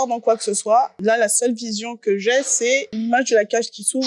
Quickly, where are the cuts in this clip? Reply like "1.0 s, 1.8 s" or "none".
0.9 s, 2.9 s